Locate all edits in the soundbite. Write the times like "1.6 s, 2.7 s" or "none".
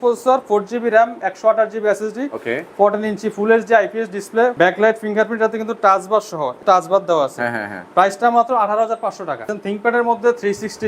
4.5 s, 6.6 s, 9.5 s